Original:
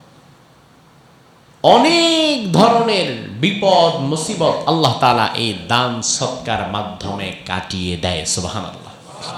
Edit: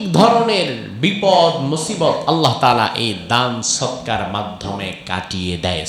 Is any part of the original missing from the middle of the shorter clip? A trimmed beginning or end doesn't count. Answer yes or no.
no